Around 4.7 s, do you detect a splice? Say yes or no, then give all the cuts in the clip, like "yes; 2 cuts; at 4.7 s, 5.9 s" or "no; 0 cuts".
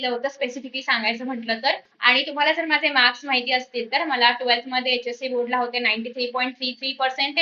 no; 1 cut; at 1.9 s